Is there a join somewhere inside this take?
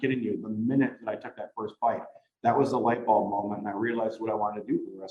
no; 0 cuts

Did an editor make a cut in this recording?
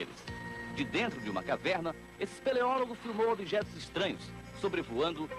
no; 0 cuts

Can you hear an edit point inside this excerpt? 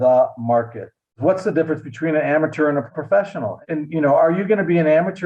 yes; 1 cut; at 1.2 s

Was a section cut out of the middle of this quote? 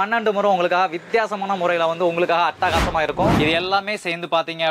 yes; 1 cut; at 3.3 s

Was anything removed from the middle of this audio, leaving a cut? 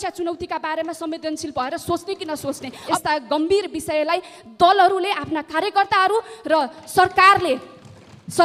yes; 1 cut; at 2.7 s

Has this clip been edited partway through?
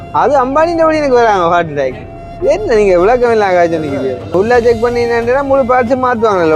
yes; 1 cut; at 4.3 s

